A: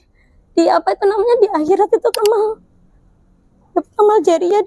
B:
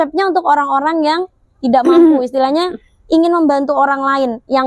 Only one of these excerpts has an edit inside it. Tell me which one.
A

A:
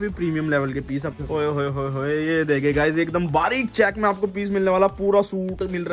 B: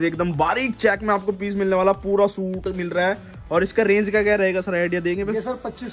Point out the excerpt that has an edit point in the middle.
A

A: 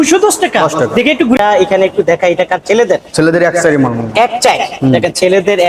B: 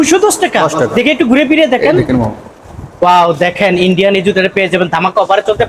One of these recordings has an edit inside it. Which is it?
A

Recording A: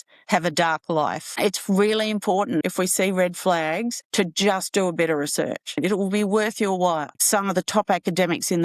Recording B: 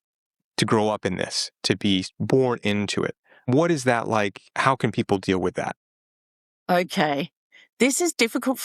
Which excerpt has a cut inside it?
A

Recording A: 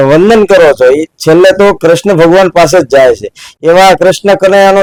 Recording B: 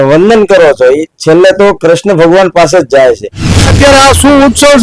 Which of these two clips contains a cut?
B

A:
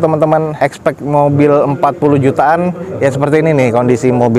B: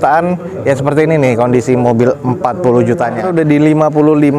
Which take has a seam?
B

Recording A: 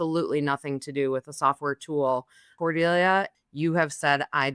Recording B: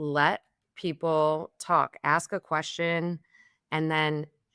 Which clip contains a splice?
A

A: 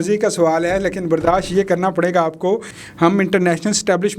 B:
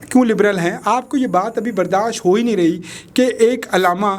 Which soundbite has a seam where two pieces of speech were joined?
A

